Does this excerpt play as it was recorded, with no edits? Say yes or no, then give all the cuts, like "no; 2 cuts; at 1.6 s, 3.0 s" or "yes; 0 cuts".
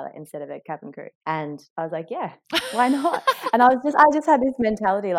yes; 0 cuts